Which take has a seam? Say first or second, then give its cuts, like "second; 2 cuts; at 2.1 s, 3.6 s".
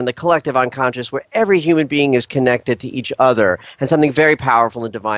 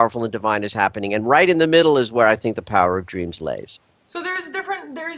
first; 1 cut; at 2.6 s